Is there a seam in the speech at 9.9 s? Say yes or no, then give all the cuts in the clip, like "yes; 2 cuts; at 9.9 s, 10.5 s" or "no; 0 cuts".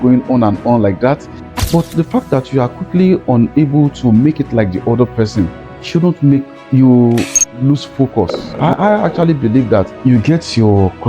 yes; 3 cuts; at 1.4 s, 8.4 s, 9.9 s